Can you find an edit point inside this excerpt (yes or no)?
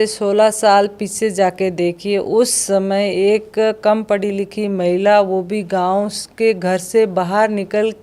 no